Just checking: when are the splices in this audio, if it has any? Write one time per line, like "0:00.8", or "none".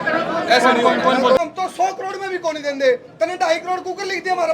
0:01.4